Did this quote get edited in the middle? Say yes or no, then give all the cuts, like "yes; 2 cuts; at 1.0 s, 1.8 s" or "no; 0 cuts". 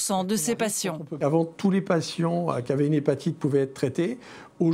yes; 1 cut; at 1.1 s